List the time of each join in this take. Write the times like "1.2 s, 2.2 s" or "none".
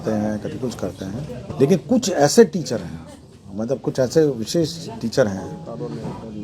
1.4 s